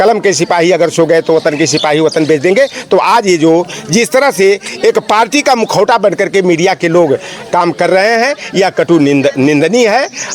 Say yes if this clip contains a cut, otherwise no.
no